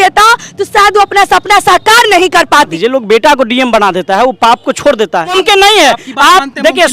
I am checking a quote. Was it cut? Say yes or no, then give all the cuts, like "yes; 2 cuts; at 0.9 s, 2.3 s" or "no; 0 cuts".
yes; 2 cuts; at 2.7 s, 5.3 s